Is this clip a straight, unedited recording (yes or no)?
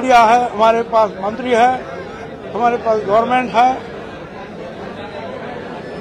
yes